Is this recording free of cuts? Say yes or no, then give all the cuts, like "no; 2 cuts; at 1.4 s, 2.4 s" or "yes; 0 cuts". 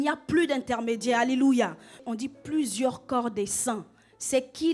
no; 1 cut; at 2.0 s